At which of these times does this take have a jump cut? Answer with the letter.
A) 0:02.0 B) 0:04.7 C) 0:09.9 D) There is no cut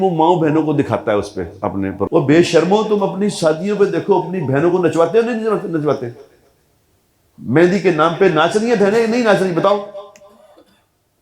A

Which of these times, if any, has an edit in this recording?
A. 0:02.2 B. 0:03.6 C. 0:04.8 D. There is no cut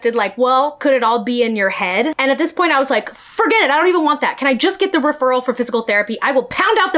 A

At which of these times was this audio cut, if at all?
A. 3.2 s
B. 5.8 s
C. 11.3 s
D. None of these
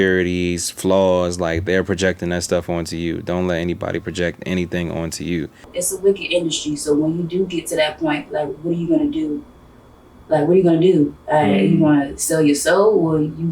B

